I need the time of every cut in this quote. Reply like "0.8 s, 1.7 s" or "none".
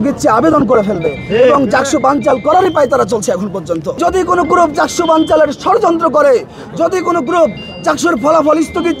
4.0 s